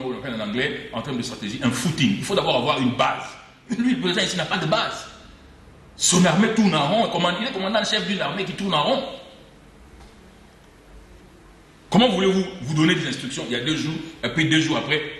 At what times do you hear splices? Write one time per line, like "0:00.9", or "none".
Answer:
none